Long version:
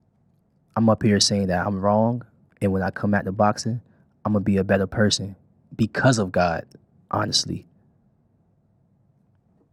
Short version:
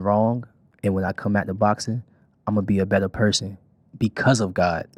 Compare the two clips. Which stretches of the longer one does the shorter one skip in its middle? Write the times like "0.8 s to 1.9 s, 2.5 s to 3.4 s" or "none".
none